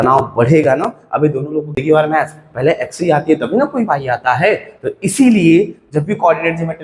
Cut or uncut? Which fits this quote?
cut